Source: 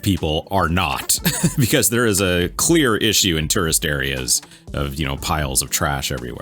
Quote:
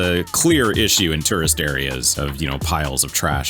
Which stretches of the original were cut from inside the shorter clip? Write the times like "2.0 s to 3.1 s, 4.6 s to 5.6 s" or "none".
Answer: 4.3 s to 4.7 s